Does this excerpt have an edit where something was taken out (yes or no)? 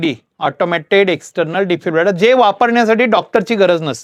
no